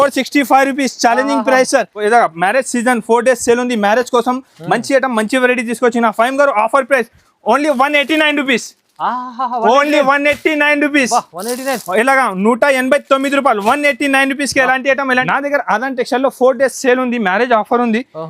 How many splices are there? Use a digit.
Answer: 2